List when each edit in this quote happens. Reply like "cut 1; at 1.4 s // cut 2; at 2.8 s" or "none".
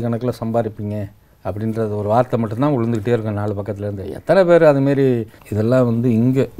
cut 1; at 5.4 s

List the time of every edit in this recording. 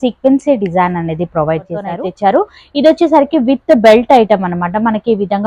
cut 1; at 2.0 s

